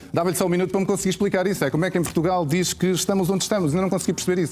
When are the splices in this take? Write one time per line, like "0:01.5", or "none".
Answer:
none